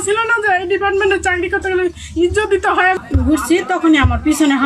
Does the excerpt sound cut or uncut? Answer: cut